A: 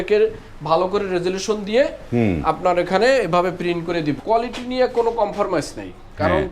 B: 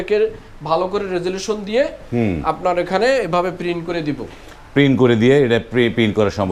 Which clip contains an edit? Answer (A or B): A